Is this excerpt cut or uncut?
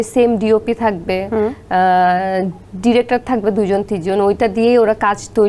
uncut